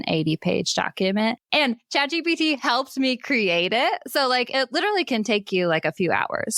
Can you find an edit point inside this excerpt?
yes; 1 cut; at 1.4 s

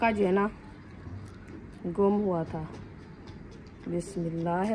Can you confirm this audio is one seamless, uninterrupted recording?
yes; 0 cuts

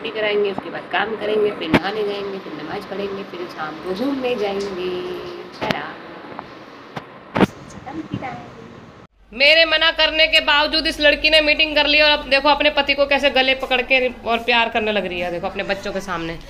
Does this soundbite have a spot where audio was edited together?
no; 0 cuts

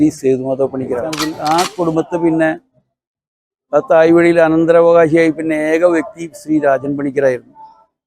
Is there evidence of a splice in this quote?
yes; 1 cut; at 1.3 s

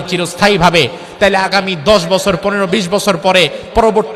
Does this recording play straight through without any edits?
yes; 0 cuts

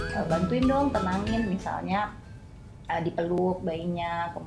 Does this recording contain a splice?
yes; 1 cut; at 3.4 s

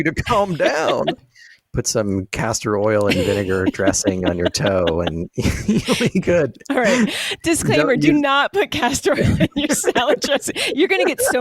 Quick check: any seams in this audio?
yes; 1 cut; at 1.2 s

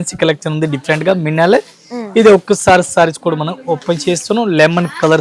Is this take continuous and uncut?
yes; 0 cuts

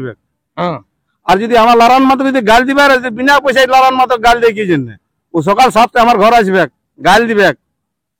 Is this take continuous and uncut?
yes; 0 cuts

